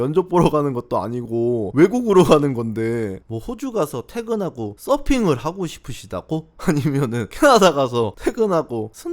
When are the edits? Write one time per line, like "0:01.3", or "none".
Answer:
0:01.7
0:03.1